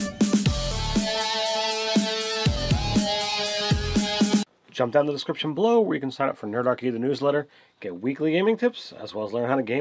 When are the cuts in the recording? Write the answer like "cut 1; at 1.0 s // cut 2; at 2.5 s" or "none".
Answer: cut 1; at 7.0 s